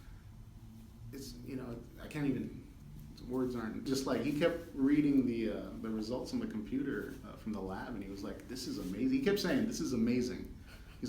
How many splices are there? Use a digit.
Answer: 1